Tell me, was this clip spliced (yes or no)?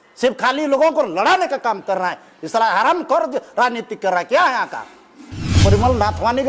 yes